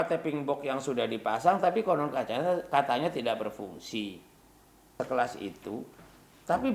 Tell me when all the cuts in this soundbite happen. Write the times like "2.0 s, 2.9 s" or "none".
4.9 s